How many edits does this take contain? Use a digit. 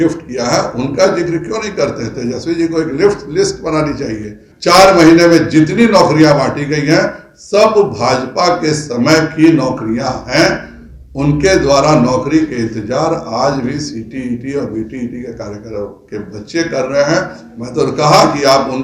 1